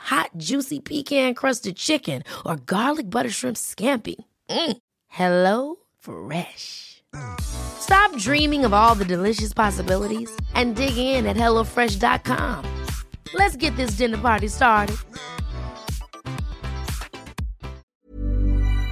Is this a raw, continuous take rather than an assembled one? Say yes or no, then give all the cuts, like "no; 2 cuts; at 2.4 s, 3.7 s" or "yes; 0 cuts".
no; 1 cut; at 17.9 s